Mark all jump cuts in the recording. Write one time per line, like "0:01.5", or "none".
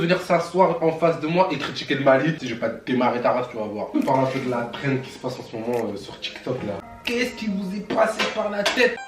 0:02.5
0:03.9
0:06.8